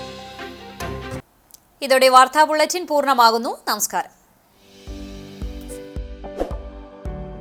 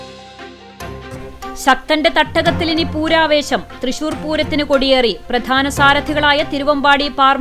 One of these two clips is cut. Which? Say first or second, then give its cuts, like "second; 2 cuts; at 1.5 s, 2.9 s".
second; 1 cut; at 1.2 s